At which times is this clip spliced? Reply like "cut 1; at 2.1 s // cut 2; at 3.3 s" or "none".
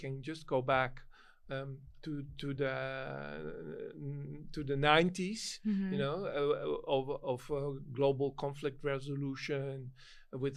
none